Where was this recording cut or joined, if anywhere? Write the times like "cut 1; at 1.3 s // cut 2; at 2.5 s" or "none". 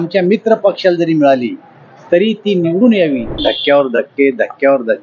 cut 1; at 3.3 s